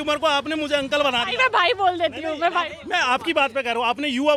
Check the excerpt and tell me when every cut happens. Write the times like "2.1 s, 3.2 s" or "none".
none